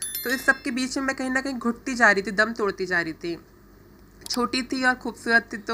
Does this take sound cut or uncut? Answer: uncut